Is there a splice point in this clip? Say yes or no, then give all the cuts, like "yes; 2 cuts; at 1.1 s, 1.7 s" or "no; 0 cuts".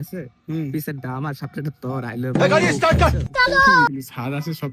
yes; 2 cuts; at 2.3 s, 3.9 s